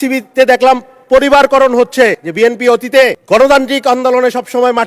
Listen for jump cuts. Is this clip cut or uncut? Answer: cut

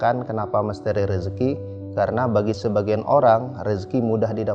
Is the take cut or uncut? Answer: uncut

